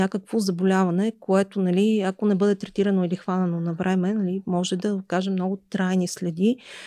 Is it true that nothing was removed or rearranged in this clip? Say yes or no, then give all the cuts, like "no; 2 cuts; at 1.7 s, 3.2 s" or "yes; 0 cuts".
yes; 0 cuts